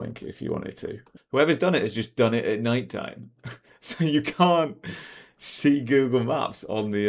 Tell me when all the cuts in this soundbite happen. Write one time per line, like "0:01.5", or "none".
0:01.1